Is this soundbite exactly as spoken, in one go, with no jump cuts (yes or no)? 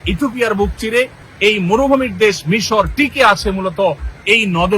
no